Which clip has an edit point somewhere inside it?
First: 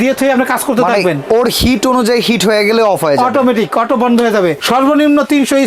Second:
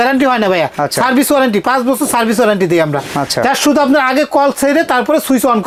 first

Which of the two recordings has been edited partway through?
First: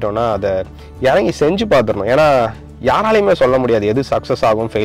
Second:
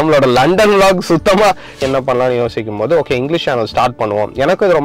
second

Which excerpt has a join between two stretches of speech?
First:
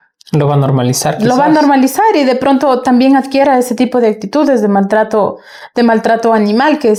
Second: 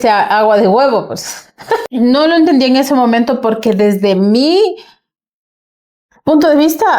second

